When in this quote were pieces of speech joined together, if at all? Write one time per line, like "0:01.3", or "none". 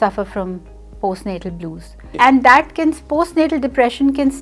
0:02.1